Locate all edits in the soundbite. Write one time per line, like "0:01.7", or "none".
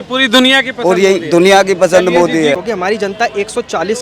0:02.6

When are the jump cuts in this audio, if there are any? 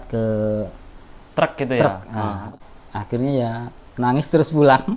0:02.4
0:03.8

